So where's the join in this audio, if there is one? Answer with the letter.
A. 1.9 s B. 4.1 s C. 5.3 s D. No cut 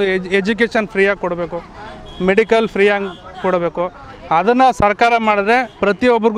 D